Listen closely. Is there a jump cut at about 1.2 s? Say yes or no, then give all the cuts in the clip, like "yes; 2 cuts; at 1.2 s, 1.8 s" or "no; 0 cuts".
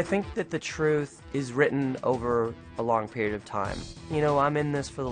yes; 1 cut; at 1.2 s